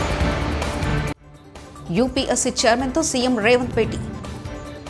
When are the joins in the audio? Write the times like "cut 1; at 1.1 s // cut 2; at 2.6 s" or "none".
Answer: none